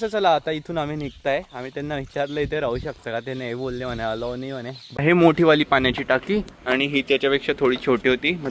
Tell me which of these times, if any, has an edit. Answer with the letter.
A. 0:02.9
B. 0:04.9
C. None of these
B